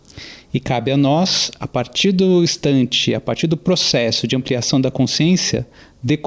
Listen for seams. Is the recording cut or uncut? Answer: uncut